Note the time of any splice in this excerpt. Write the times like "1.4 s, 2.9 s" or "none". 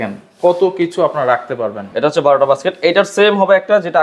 1.8 s